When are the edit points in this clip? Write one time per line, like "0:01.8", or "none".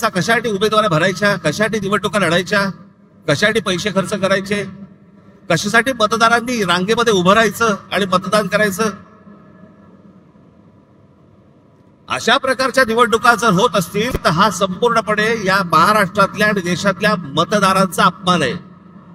none

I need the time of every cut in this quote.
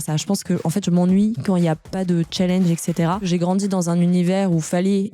0:03.2

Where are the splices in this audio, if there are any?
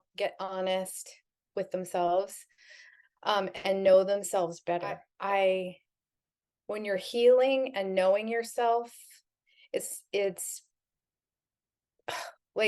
0:05.1

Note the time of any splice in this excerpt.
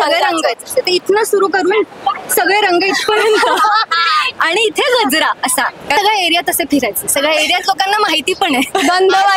0:05.9

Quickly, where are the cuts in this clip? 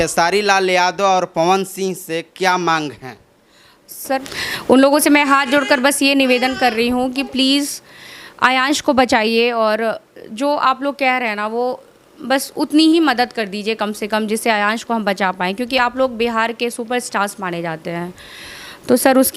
0:04.2

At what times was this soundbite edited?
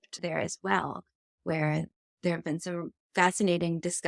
none

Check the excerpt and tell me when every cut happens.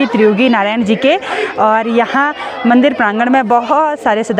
none

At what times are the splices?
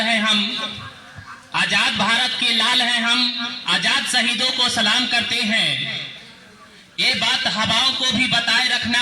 none

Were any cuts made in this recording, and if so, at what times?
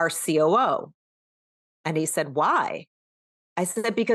none

